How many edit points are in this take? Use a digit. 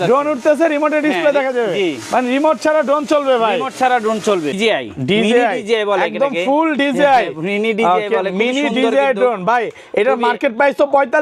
1